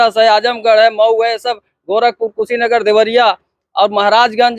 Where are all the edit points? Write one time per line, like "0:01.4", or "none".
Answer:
none